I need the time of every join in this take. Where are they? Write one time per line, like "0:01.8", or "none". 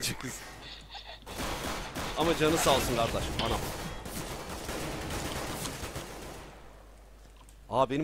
0:03.3